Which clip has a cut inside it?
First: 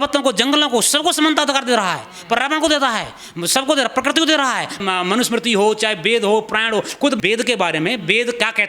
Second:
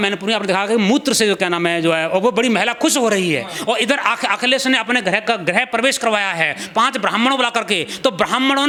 first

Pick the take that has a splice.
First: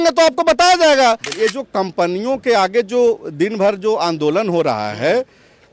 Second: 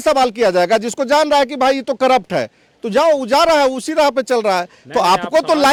first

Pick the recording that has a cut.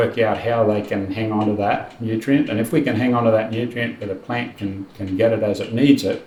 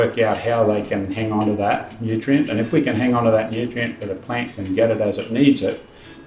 second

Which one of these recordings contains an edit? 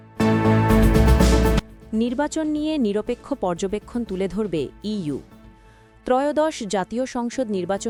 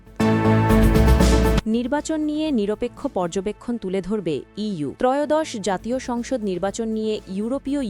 second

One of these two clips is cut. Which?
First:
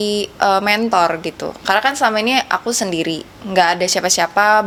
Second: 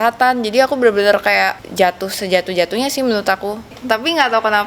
second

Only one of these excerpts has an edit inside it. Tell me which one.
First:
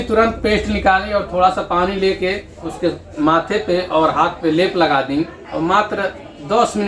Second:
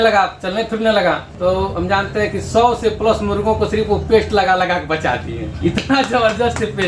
second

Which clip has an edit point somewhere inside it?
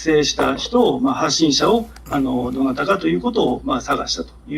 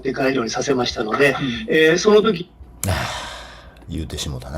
second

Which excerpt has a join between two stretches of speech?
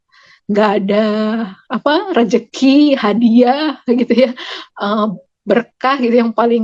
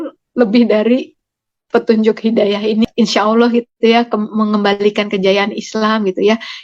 second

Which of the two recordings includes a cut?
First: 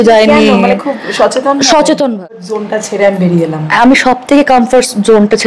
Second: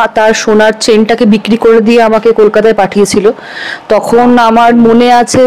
first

